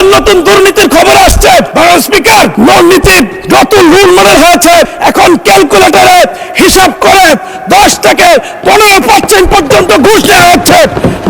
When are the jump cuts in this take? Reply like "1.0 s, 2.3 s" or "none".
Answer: 1.7 s